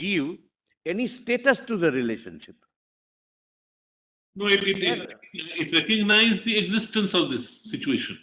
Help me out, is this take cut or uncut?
uncut